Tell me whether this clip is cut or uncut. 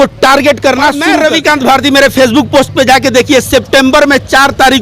cut